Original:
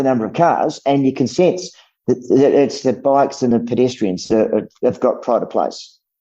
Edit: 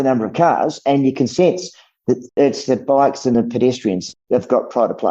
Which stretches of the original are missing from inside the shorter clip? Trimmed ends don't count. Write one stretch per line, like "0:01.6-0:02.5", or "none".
0:02.3-0:02.5
0:04.3-0:04.6